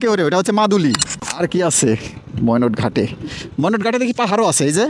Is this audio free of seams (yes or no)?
no